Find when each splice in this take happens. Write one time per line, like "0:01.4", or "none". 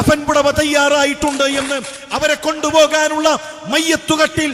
none